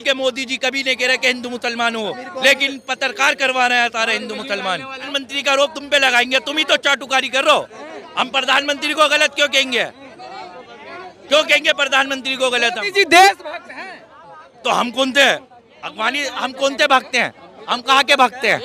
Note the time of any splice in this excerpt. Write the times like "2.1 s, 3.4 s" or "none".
5.1 s